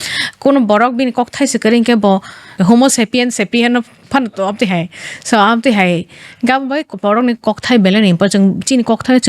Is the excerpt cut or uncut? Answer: cut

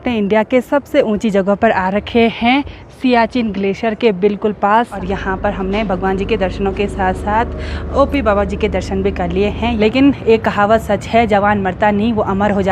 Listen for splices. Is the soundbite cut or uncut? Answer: cut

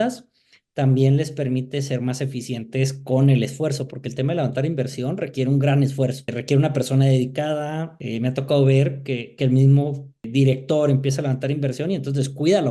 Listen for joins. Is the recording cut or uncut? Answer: cut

